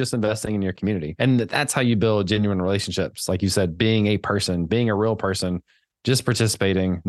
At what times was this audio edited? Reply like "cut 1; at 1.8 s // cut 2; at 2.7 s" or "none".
cut 1; at 1.1 s

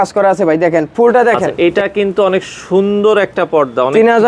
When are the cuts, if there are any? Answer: cut 1; at 1.5 s

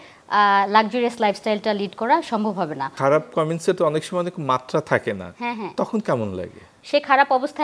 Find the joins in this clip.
cut 1; at 2.9 s // cut 2; at 6.7 s

